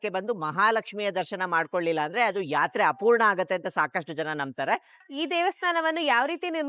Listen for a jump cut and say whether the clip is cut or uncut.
cut